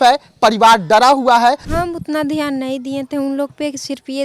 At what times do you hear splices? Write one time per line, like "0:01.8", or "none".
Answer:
0:01.7